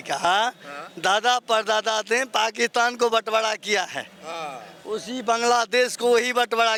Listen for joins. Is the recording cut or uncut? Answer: uncut